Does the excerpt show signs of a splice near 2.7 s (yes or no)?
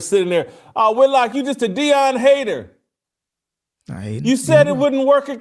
no